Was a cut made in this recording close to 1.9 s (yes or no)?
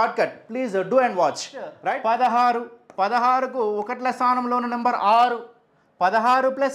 yes